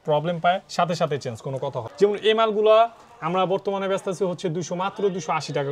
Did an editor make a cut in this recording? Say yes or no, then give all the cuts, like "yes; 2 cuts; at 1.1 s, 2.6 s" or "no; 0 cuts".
yes; 1 cut; at 1.8 s